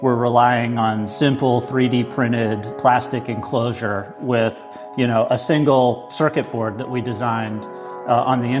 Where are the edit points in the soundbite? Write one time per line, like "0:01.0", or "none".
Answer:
none